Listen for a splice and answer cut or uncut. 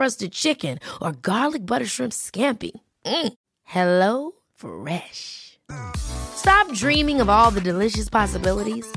uncut